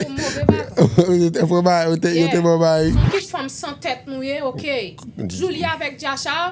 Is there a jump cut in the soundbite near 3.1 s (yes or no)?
yes